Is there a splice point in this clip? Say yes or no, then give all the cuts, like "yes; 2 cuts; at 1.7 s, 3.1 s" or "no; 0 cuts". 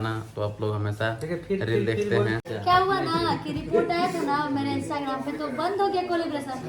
yes; 1 cut; at 2.5 s